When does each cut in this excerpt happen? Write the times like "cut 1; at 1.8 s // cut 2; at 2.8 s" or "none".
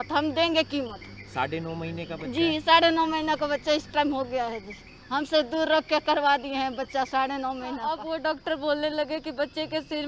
cut 1; at 7.9 s